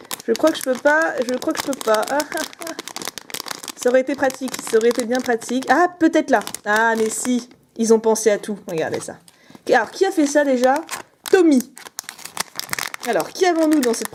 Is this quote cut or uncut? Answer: uncut